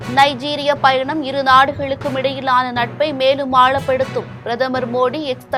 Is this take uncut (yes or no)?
yes